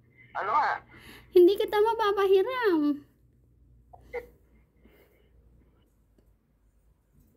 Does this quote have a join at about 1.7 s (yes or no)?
no